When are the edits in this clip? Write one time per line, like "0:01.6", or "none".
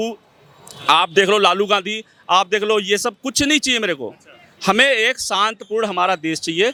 none